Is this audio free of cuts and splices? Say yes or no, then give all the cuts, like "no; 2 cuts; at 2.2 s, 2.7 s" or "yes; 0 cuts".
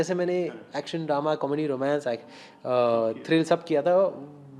yes; 0 cuts